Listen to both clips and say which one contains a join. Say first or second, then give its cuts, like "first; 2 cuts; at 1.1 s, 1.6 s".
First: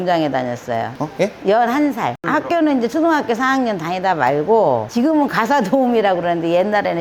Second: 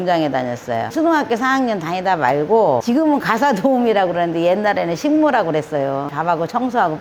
second; 3 cuts; at 0.9 s, 2.8 s, 6.1 s